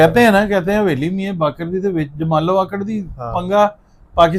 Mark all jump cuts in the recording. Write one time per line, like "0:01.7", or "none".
none